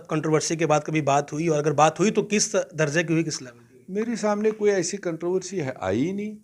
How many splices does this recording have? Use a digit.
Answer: 0